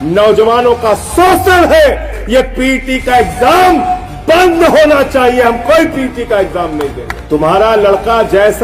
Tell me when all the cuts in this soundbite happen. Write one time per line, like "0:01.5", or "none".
0:02.1
0:07.1